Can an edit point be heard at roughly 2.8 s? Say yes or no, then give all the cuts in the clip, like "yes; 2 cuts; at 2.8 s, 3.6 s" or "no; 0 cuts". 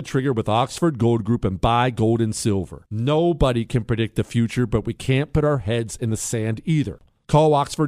no; 1 cut; at 7.0 s